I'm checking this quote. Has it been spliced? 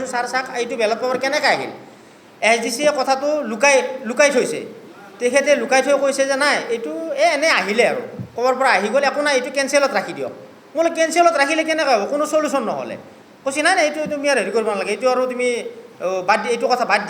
no; 0 cuts

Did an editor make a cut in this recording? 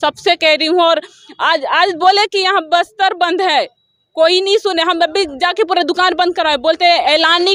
no; 0 cuts

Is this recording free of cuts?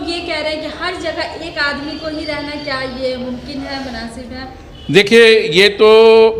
yes; 0 cuts

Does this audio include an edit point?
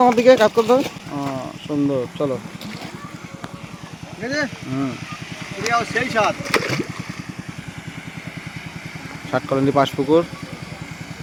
no; 0 cuts

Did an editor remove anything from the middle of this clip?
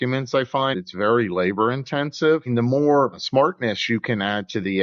yes; 3 cuts; at 0.7 s, 2.5 s, 3.2 s

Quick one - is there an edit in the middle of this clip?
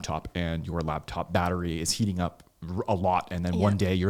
no; 0 cuts

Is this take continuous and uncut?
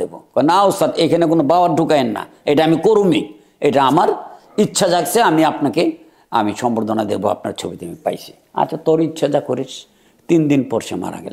yes; 0 cuts

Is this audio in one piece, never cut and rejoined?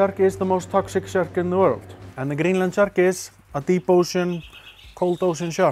yes; 0 cuts

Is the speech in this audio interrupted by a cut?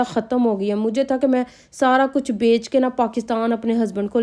no; 0 cuts

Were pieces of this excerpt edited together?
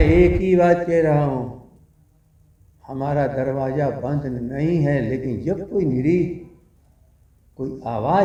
no; 0 cuts

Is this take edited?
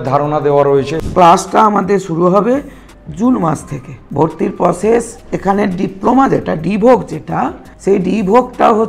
yes; 1 cut; at 1.0 s

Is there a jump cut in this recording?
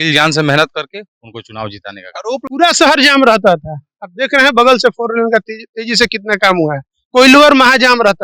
yes; 1 cut; at 2.4 s

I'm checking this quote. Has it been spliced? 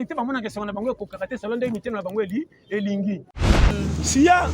yes; 1 cut; at 3.6 s

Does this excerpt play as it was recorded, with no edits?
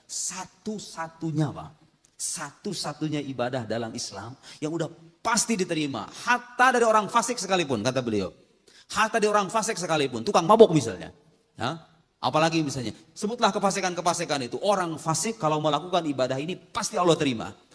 yes; 0 cuts

